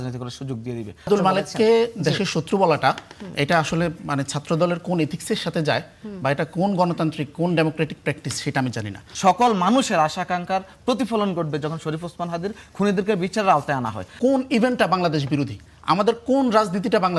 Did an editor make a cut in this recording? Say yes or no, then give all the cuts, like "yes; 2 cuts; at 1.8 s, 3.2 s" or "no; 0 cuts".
yes; 3 cuts; at 1.1 s, 9.0 s, 14.0 s